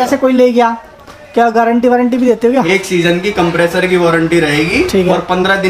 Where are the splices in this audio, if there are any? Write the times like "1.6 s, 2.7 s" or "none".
none

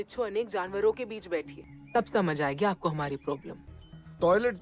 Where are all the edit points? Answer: 3.7 s

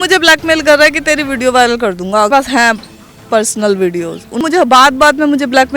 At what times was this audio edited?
2.3 s, 4.4 s

